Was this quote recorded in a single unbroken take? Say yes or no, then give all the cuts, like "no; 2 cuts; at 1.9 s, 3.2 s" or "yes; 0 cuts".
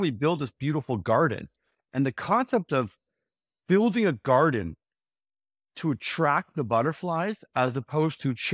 yes; 0 cuts